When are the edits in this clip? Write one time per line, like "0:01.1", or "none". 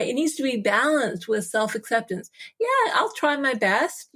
none